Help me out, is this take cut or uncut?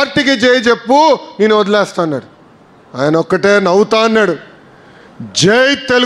uncut